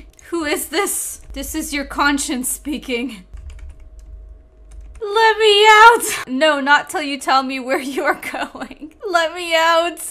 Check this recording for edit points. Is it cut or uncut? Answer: cut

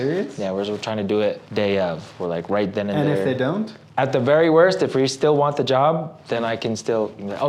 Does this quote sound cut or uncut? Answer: cut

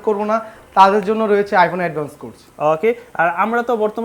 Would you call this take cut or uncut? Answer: uncut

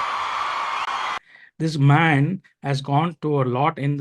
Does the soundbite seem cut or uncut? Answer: cut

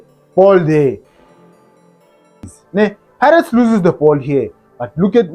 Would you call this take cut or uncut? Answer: cut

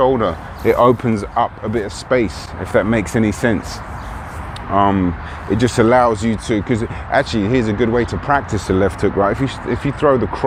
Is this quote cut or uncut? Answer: uncut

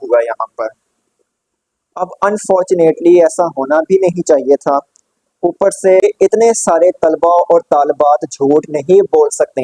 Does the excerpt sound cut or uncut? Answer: cut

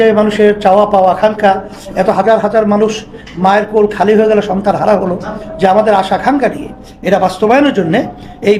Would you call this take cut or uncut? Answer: uncut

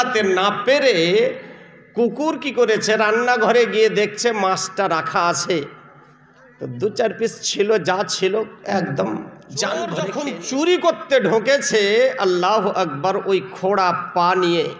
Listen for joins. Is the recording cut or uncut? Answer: cut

